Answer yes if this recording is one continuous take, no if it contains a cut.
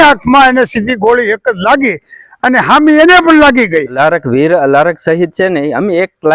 no